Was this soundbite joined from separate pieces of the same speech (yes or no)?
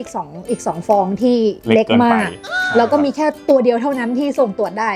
no